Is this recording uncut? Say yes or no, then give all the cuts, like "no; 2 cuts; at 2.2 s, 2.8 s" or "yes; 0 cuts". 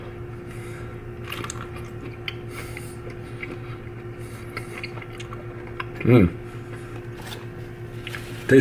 yes; 0 cuts